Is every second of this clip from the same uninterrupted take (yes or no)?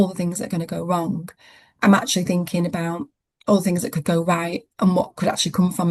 yes